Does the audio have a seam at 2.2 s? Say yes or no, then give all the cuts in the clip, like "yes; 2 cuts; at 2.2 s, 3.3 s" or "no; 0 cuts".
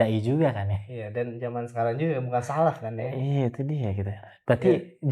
no; 0 cuts